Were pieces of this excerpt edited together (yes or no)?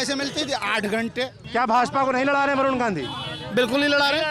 yes